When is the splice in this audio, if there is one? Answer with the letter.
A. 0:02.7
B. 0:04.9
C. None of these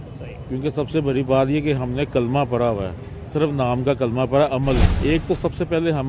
B